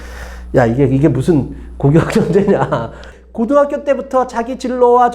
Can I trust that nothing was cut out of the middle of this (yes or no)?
no